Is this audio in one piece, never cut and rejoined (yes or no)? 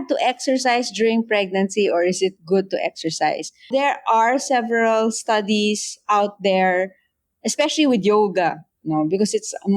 no